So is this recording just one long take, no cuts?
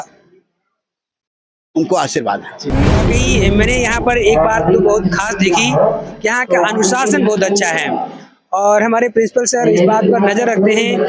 no; 1 cut; at 3.1 s

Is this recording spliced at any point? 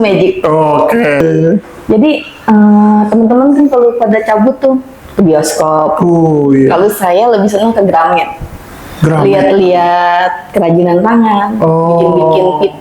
yes; 1 cut; at 1.2 s

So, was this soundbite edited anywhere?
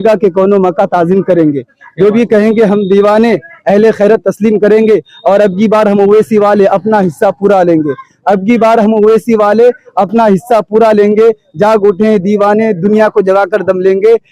no; 0 cuts

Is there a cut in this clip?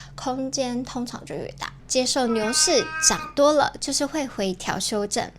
yes; 1 cut; at 1.6 s

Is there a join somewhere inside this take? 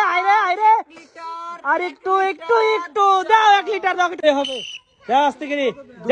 yes; 1 cut; at 4.2 s

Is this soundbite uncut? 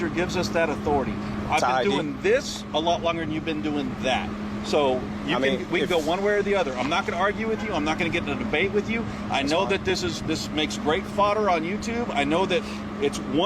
yes; 0 cuts

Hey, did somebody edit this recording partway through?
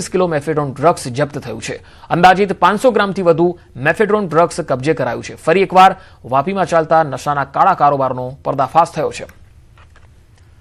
no; 0 cuts

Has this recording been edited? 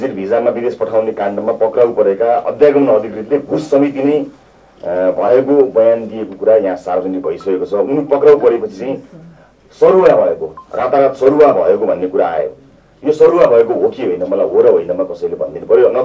no; 0 cuts

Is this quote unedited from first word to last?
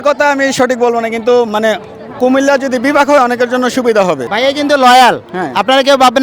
no; 1 cut; at 4.2 s

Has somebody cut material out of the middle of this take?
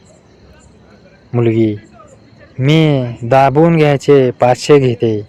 no; 0 cuts

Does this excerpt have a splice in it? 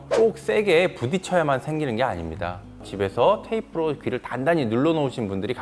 yes; 1 cut; at 2.9 s

